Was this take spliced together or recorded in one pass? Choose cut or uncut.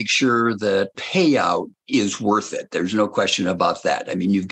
cut